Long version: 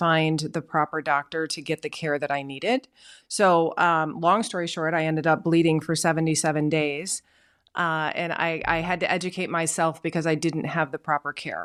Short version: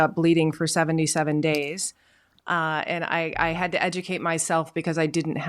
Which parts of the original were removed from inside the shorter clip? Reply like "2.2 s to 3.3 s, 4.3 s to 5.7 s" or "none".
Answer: none